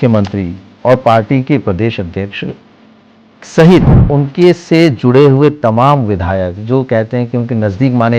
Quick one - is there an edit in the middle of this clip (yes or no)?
no